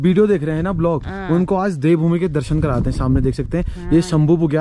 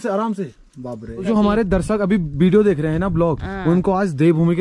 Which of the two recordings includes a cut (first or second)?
second